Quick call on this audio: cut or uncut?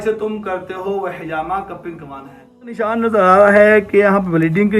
cut